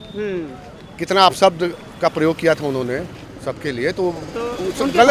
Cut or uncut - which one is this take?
uncut